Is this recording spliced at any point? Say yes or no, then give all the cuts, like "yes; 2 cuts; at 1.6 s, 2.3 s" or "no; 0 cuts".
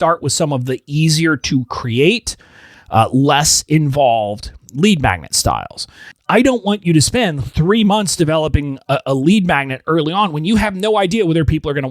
yes; 1 cut; at 6.1 s